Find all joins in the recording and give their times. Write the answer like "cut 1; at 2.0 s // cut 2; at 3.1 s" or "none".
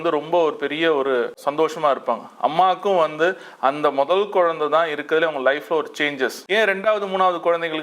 cut 1; at 1.4 s // cut 2; at 6.4 s